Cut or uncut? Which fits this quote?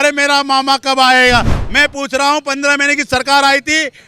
cut